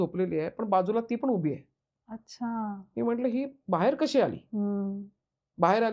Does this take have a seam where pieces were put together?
no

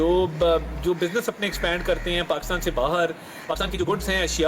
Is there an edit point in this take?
yes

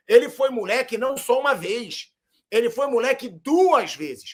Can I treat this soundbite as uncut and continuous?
yes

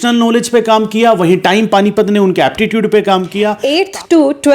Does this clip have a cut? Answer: yes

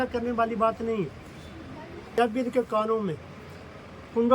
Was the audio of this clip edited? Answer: yes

